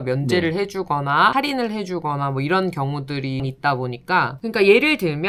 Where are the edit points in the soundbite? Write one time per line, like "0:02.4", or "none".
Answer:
none